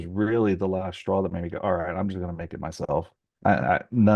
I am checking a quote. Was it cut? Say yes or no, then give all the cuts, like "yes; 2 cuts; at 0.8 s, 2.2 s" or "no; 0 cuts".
no; 0 cuts